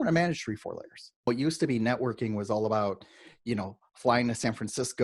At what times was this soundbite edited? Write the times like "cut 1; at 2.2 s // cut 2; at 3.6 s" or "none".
cut 1; at 1.3 s